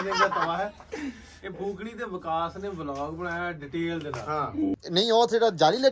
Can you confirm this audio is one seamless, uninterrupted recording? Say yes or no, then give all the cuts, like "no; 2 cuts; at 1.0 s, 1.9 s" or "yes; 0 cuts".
no; 1 cut; at 4.8 s